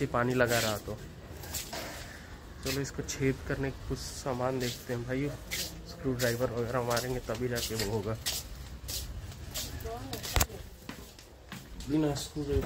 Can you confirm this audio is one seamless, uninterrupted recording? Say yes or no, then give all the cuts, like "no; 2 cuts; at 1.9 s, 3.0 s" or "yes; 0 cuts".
yes; 0 cuts